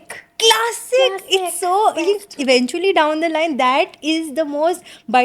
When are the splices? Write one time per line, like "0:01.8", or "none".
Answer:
0:02.3

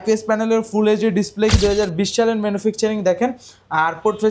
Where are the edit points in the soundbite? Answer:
0:01.5

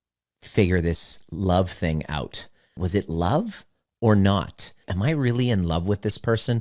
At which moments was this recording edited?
0:02.8
0:04.9

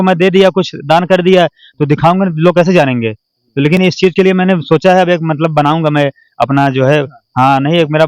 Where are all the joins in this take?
none

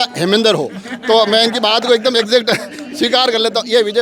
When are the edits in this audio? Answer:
none

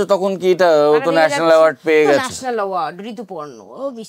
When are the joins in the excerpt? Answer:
none

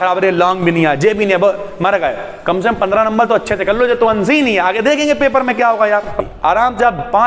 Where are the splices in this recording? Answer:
0:06.2

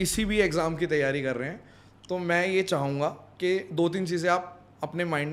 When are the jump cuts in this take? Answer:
none

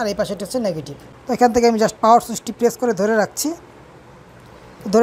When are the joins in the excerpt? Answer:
0:01.1

